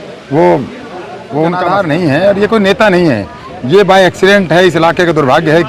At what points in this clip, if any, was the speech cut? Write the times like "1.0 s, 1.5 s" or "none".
1.6 s